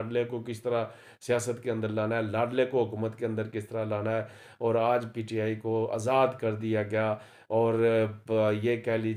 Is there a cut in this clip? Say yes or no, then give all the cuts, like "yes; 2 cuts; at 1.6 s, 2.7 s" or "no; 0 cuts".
no; 0 cuts